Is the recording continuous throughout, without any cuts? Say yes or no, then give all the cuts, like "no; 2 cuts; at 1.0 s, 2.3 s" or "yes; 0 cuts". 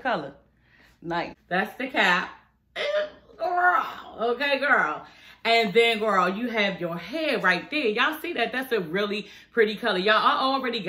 no; 1 cut; at 1.4 s